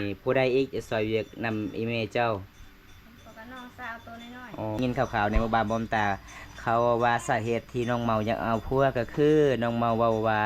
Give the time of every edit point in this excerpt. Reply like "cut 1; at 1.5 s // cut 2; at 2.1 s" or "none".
cut 1; at 4.8 s